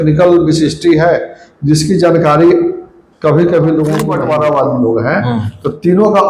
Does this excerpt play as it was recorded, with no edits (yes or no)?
no